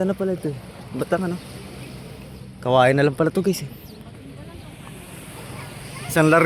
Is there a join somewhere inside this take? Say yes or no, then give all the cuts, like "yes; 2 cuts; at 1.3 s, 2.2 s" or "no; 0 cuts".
no; 0 cuts